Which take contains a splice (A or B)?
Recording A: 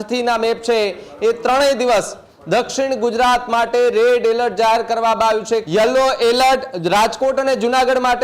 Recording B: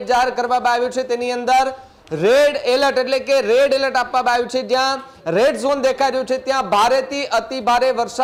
A